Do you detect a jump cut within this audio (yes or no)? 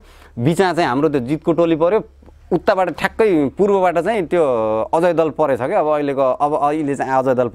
no